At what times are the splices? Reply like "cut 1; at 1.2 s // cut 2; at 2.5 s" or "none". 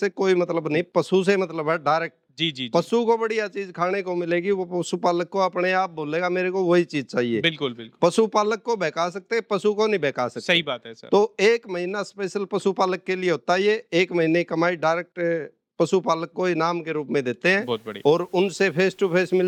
none